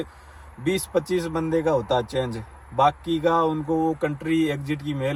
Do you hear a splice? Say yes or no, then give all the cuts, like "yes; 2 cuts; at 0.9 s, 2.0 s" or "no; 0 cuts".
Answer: no; 0 cuts